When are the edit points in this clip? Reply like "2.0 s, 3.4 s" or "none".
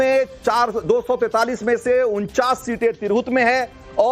1.3 s